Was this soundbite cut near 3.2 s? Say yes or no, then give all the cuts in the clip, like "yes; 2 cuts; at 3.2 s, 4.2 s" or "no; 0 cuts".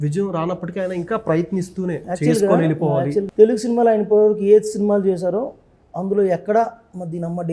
yes; 1 cut; at 3.2 s